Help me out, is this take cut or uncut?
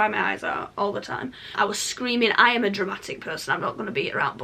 cut